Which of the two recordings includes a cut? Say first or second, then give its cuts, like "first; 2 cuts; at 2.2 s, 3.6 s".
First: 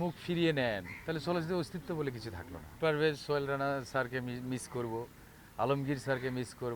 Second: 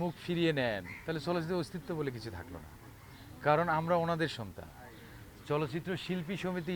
first; 1 cut; at 2.7 s